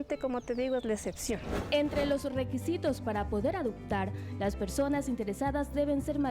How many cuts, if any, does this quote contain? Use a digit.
1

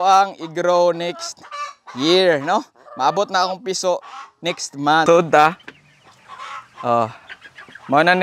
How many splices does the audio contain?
1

